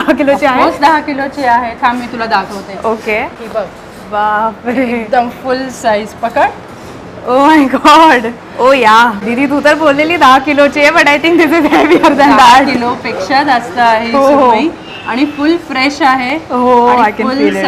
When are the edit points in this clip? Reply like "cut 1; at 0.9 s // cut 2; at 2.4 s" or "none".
cut 1; at 3.3 s // cut 2; at 9.2 s